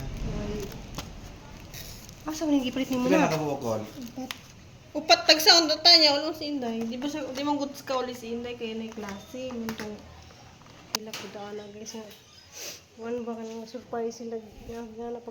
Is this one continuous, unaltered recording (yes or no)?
no